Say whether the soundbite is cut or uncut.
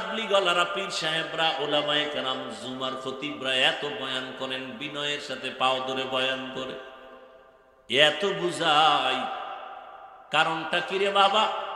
uncut